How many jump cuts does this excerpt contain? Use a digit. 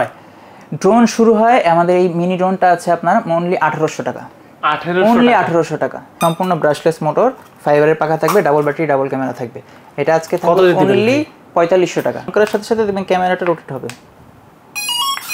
2